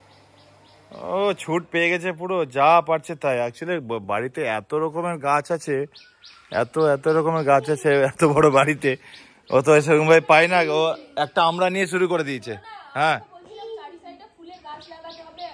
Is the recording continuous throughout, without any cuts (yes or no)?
yes